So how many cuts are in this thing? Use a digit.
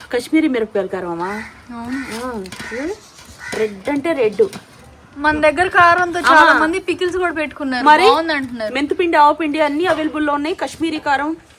0